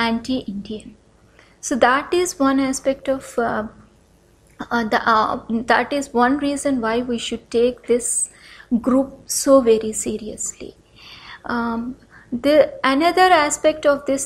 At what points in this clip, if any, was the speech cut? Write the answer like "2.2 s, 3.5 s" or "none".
none

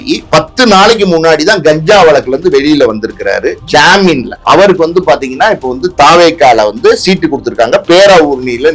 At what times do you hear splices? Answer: 4.3 s

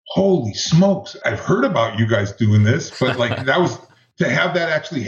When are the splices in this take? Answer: 1.2 s

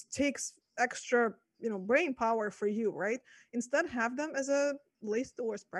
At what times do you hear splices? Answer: none

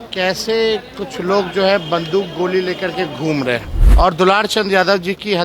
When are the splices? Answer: 3.8 s

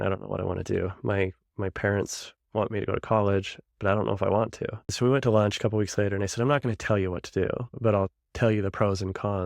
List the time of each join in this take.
4.9 s

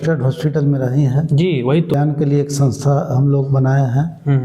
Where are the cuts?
1.9 s

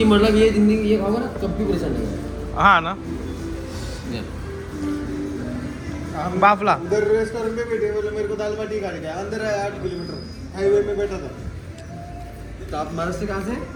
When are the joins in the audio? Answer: none

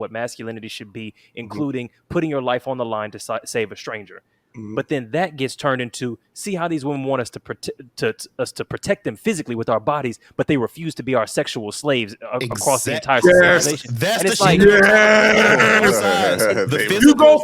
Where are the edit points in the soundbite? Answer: none

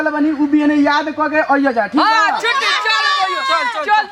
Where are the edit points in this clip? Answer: none

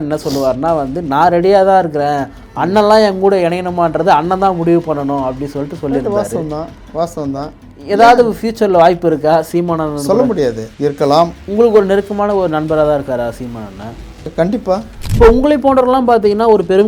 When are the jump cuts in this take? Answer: 10.9 s, 14.3 s, 15.0 s

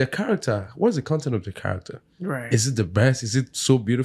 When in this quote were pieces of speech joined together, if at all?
none

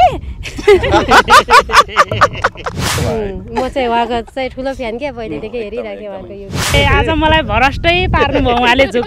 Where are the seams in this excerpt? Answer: 3.0 s, 6.7 s

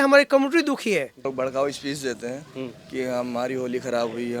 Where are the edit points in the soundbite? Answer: 1.2 s

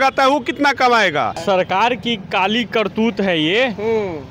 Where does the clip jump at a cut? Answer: 1.4 s

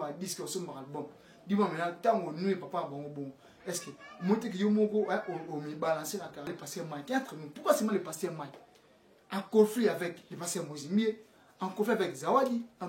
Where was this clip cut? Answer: 6.5 s

